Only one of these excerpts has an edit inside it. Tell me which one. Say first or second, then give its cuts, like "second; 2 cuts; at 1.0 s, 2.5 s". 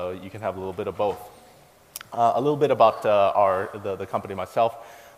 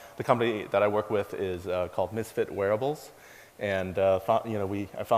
second; 1 cut; at 3.9 s